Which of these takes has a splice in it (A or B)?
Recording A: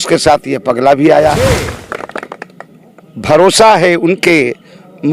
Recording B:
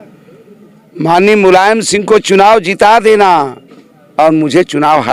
A